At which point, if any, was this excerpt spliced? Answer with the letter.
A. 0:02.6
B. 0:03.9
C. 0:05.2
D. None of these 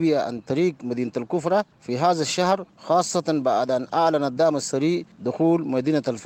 C